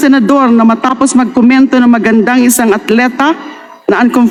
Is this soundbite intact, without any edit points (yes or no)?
yes